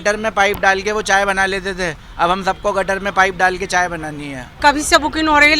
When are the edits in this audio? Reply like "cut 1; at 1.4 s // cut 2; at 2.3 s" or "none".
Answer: cut 1; at 4.5 s